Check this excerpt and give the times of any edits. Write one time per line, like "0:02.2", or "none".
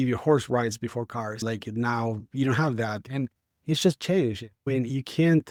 none